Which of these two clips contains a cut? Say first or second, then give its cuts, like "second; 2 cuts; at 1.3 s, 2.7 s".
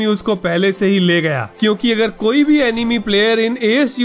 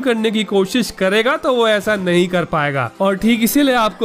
second; 1 cut; at 2.9 s